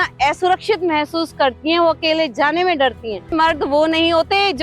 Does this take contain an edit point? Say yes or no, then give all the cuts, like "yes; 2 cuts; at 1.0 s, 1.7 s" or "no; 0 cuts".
yes; 1 cut; at 3.3 s